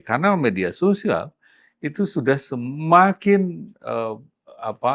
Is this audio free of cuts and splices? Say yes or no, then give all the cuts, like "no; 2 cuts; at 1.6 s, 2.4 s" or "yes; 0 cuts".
yes; 0 cuts